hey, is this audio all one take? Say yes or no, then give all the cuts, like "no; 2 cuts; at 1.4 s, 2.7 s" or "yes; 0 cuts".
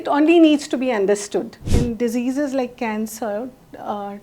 no; 1 cut; at 1.7 s